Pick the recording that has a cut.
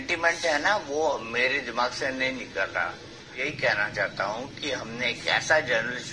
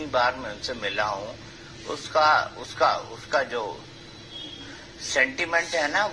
first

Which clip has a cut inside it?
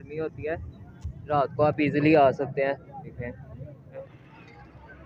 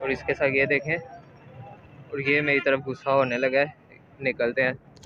first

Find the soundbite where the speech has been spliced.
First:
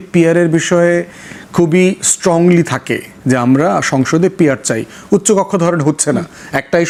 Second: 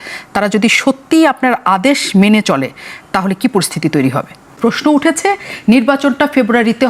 second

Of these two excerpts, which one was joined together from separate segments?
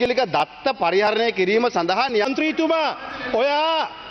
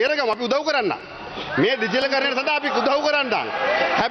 first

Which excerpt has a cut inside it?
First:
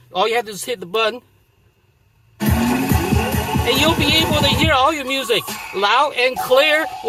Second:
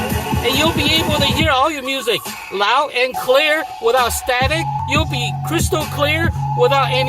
second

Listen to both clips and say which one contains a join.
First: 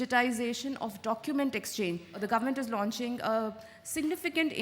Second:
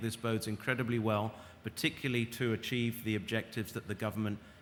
first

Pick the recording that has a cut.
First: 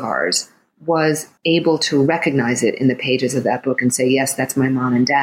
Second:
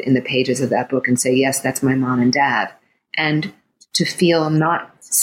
first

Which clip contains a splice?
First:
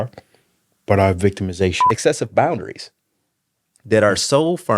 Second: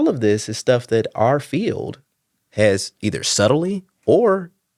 first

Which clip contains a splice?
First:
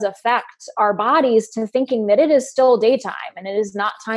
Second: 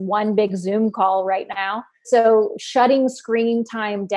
second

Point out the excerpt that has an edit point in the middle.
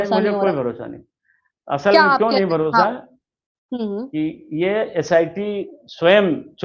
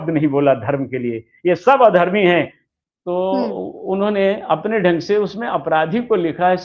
second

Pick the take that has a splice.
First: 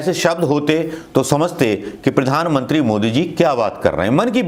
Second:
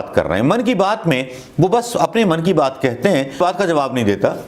second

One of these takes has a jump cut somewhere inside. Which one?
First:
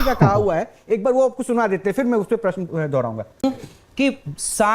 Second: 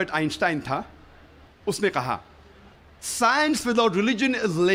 first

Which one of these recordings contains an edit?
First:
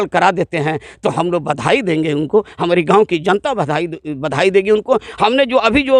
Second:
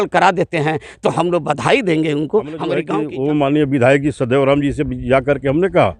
second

